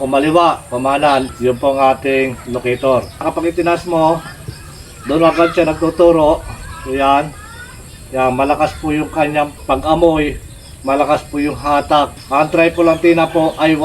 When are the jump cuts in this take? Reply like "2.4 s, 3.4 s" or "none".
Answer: 1.3 s, 3.3 s, 9.6 s, 12.2 s